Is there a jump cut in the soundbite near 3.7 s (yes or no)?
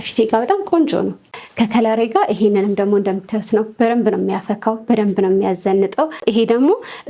no